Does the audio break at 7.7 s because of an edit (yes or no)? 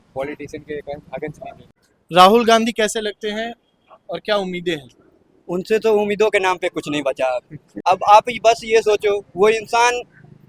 yes